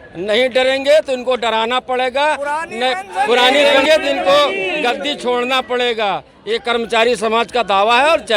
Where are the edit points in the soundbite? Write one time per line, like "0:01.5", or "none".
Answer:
0:03.8